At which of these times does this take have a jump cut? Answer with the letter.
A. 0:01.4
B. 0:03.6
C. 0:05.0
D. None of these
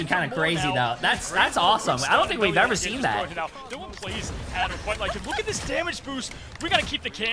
D